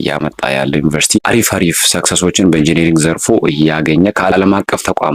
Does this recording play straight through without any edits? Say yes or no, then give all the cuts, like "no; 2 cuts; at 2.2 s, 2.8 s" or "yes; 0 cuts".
yes; 0 cuts